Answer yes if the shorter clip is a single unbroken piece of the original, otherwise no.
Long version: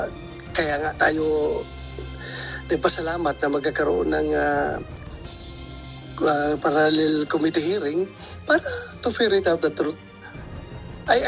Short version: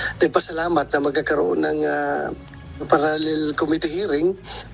no